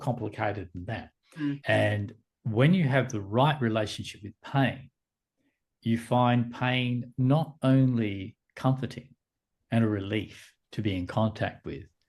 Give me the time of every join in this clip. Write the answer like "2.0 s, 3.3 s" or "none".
1.6 s